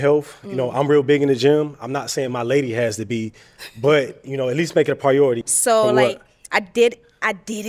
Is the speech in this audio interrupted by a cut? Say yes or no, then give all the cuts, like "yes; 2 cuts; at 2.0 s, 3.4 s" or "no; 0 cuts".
yes; 1 cut; at 5.5 s